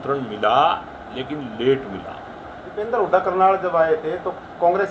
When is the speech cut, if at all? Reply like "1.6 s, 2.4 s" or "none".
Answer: 2.8 s